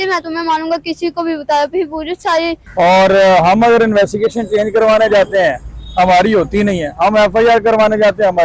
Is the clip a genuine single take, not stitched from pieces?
no; 1 cut; at 2.6 s

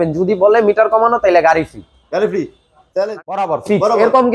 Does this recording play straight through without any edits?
no; 1 cut; at 2.9 s

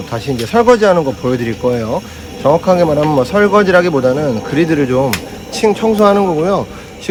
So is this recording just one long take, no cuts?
yes; 0 cuts

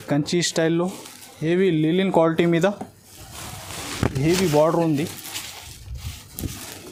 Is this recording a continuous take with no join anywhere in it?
yes; 0 cuts

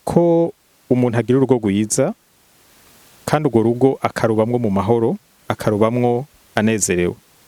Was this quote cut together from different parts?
no; 0 cuts

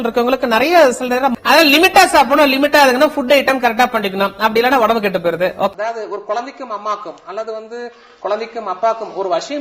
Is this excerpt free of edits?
no; 2 cuts; at 1.3 s, 5.7 s

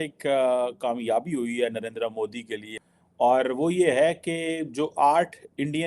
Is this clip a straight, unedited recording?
no; 1 cut; at 2.7 s

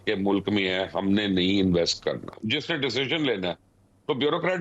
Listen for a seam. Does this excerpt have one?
yes; 1 cut; at 2.4 s

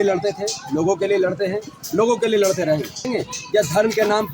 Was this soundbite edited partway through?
yes; 1 cut; at 3.1 s

